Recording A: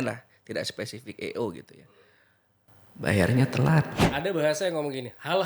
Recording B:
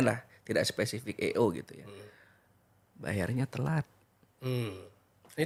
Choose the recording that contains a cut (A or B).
A